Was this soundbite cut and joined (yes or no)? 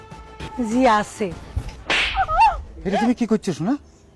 yes